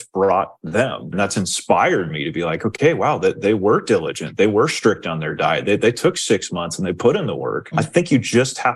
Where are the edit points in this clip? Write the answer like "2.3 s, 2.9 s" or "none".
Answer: 1.1 s, 7.7 s

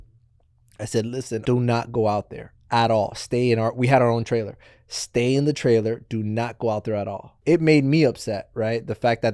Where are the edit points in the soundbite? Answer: 1.4 s, 7.4 s

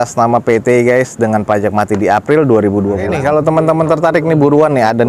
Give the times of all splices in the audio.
3.1 s

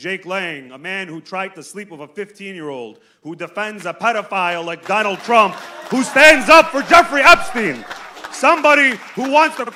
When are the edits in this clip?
none

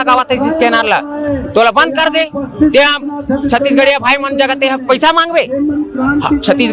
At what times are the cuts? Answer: none

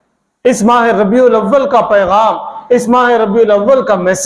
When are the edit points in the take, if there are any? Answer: none

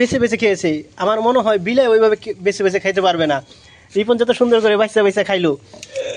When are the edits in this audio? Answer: 5.0 s

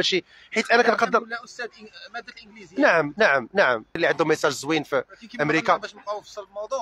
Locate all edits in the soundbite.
4.0 s

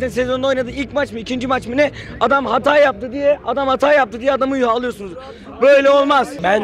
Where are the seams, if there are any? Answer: none

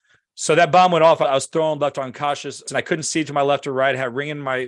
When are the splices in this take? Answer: 2.7 s

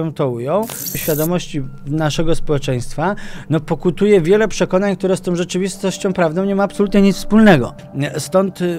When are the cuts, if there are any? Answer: 0.9 s, 7.8 s

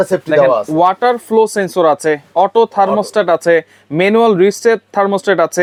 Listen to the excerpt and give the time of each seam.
none

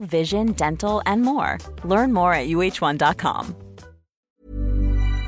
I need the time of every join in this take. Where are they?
4.3 s

